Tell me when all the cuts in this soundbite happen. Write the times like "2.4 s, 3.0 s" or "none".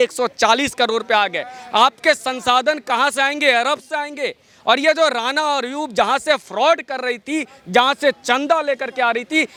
none